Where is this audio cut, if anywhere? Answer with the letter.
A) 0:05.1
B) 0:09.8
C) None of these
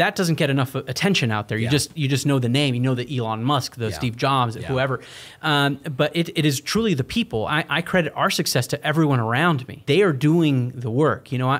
B